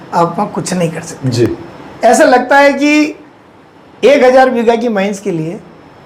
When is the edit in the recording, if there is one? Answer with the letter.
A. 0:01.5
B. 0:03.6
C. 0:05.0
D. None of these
D